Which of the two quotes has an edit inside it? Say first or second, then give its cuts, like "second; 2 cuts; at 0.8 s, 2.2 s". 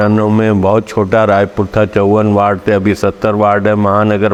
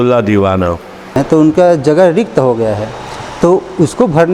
second; 1 cut; at 1.2 s